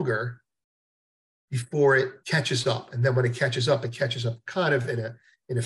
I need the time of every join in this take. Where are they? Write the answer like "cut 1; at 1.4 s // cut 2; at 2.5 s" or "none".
cut 1; at 2.2 s